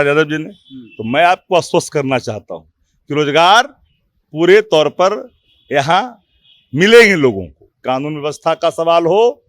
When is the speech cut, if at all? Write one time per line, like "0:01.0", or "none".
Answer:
0:07.7